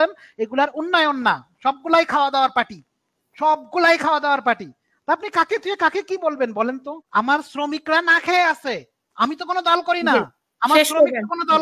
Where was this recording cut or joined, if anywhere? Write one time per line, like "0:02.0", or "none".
0:06.9